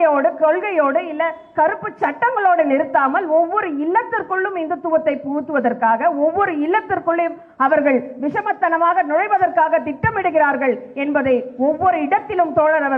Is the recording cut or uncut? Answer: uncut